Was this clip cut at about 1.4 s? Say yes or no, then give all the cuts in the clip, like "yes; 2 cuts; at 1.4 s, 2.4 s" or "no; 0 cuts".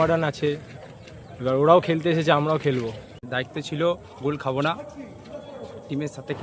no; 1 cut; at 3.3 s